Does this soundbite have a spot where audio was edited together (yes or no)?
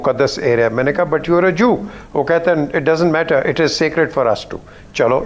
no